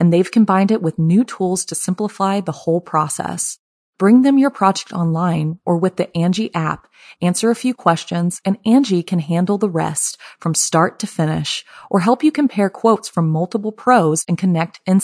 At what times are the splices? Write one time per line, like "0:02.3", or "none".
none